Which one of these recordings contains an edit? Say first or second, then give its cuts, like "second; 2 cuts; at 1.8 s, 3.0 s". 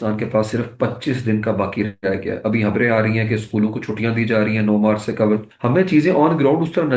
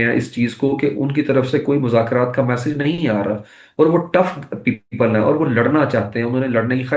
first; 1 cut; at 5.5 s